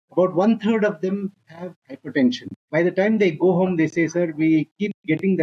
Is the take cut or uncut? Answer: cut